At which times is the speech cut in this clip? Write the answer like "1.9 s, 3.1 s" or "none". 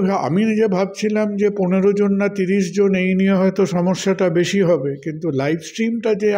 none